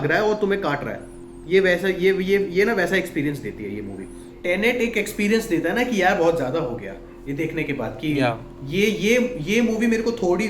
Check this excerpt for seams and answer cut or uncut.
cut